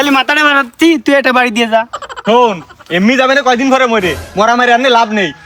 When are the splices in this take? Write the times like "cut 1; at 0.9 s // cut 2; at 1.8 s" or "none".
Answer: none